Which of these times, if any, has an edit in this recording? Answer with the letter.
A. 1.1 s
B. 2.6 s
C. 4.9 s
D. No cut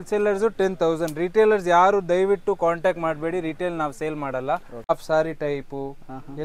C